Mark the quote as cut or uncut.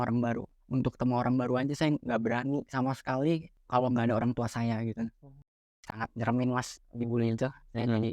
cut